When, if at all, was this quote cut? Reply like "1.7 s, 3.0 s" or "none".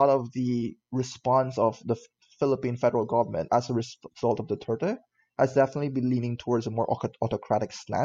none